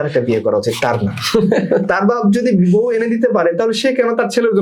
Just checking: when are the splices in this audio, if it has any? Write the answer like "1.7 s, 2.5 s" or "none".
none